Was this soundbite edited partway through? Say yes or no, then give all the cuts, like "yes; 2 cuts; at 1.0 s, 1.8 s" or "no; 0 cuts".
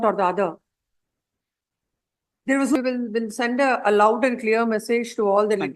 yes; 1 cut; at 2.8 s